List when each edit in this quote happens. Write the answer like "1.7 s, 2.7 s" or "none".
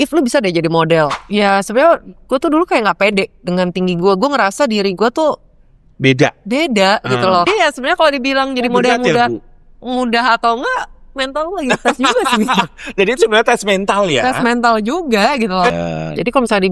1.2 s, 7.5 s, 15.7 s